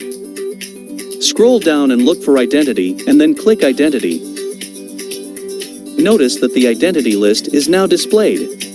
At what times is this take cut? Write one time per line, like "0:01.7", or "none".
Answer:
none